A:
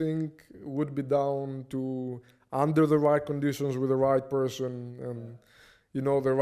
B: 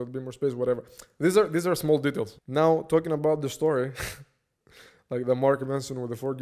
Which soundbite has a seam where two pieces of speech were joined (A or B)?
B